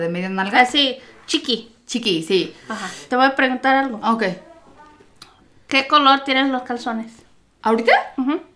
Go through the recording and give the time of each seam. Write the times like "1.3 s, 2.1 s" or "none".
3.0 s